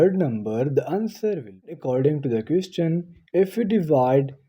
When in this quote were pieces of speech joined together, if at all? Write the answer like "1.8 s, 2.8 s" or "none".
1.8 s